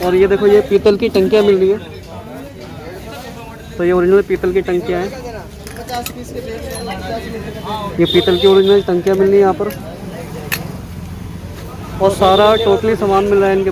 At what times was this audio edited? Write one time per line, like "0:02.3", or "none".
none